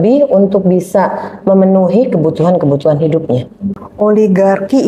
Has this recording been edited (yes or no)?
yes